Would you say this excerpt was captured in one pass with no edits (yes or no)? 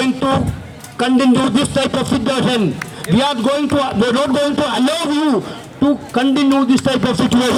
yes